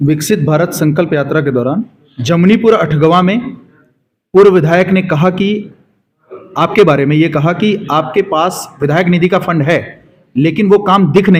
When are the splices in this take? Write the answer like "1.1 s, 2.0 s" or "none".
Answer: none